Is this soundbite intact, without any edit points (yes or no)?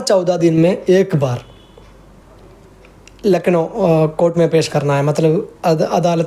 yes